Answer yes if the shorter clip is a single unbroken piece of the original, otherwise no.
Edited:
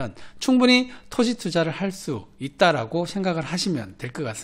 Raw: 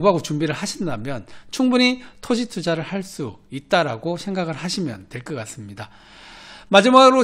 yes